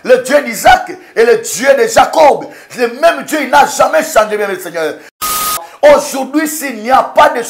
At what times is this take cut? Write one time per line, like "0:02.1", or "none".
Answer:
0:05.5